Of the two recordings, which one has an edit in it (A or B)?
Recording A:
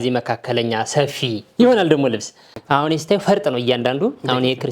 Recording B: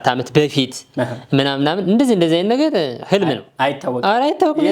A